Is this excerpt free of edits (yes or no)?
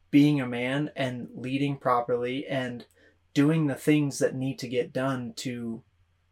yes